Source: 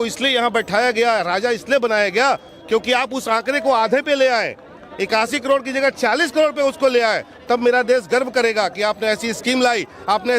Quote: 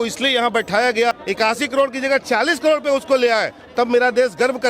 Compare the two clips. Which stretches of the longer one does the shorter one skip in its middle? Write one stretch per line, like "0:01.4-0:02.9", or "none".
0:01.1-0:04.8